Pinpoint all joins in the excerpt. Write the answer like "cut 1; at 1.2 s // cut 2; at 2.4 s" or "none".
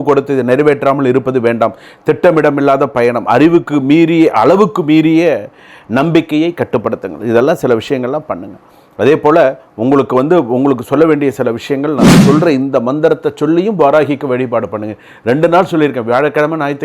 cut 1; at 12.2 s